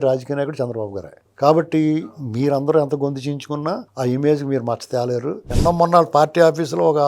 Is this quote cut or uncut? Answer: cut